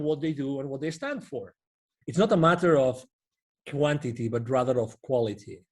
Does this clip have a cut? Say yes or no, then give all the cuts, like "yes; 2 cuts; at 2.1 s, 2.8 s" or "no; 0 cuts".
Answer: yes; 1 cut; at 1.9 s